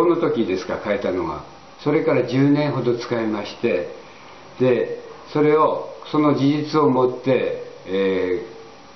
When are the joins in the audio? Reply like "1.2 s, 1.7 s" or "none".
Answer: 2.2 s